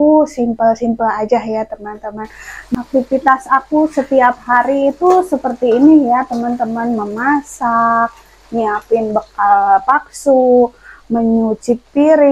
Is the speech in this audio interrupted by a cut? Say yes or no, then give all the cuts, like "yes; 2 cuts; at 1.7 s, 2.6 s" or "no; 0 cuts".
yes; 1 cut; at 2.8 s